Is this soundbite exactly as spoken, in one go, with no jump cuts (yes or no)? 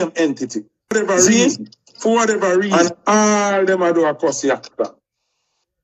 no